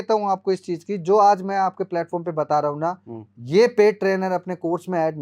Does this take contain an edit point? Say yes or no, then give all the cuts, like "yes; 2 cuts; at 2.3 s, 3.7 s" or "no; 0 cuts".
no; 0 cuts